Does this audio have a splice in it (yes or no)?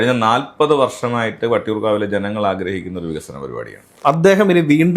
yes